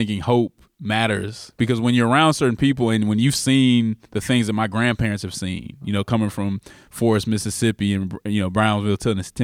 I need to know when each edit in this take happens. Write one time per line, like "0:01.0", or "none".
0:01.6